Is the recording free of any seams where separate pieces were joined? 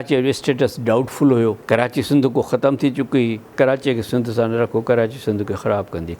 no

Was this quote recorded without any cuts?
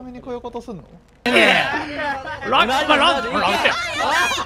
no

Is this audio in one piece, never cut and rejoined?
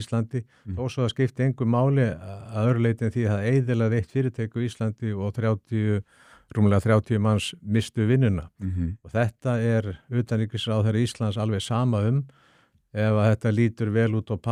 yes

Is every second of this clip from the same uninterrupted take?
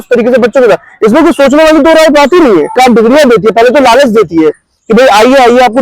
no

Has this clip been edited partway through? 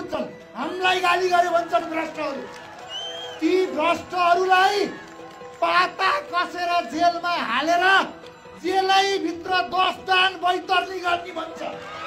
no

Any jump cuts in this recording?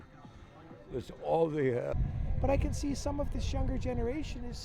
yes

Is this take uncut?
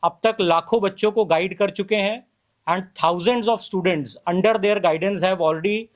yes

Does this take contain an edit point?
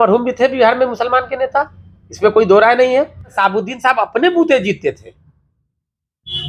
yes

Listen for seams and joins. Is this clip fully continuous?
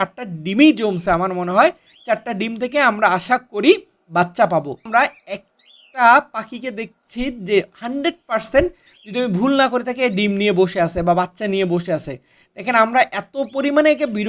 no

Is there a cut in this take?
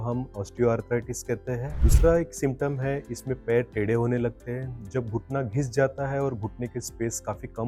yes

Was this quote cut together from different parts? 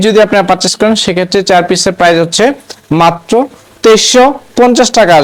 no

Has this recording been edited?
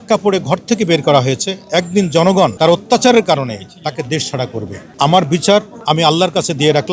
yes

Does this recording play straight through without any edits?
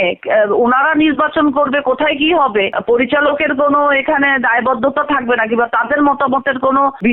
yes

